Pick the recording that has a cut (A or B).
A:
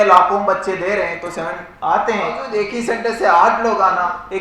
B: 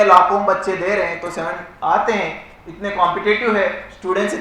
A